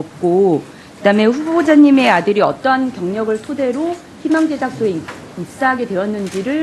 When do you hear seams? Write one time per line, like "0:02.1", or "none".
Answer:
0:04.2